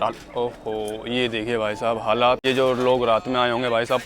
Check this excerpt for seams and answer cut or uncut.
cut